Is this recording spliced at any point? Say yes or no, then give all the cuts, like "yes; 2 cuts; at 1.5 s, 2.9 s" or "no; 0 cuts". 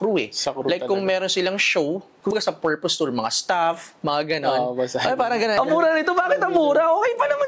yes; 2 cuts; at 2.3 s, 5.6 s